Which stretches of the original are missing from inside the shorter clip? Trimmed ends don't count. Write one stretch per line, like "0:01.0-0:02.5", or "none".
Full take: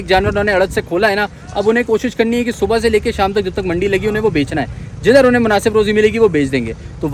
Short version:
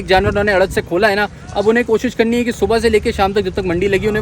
none